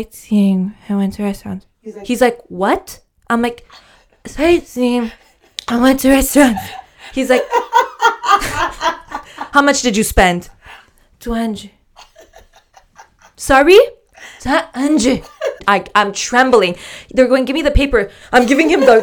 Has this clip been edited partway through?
yes; 1 cut; at 15.6 s

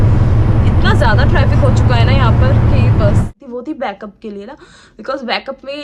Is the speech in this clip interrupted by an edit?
yes; 1 cut; at 3.3 s

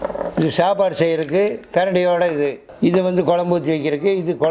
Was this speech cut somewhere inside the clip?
yes; 1 cut; at 2.6 s

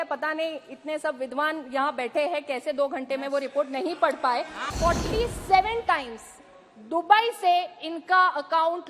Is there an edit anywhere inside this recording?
yes; 1 cut; at 4.7 s

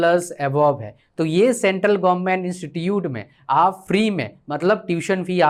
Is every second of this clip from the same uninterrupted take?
yes; 0 cuts

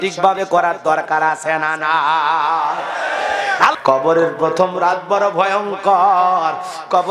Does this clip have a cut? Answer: yes; 1 cut; at 3.8 s

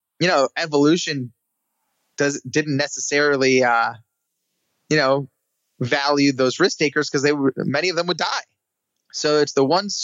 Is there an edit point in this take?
no; 0 cuts

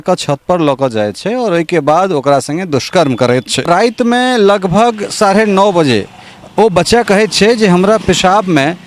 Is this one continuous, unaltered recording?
no; 1 cut; at 3.7 s

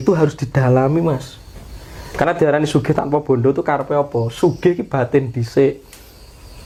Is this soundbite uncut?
yes; 0 cuts

